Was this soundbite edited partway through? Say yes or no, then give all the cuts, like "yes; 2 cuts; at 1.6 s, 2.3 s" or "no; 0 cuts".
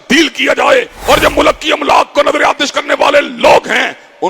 yes; 1 cut; at 0.9 s